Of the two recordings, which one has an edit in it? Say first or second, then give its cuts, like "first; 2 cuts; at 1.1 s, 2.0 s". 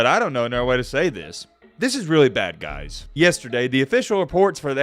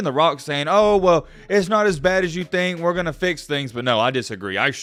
first; 1 cut; at 3.1 s